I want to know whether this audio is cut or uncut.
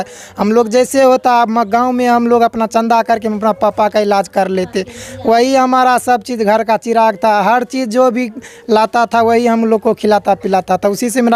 uncut